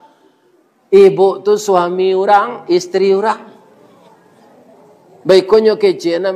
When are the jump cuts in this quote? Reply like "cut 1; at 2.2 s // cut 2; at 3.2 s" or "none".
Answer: none